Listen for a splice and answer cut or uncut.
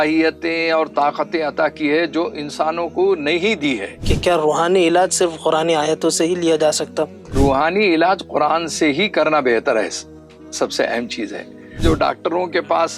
cut